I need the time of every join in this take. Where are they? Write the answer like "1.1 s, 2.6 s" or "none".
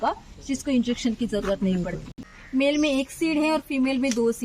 2.4 s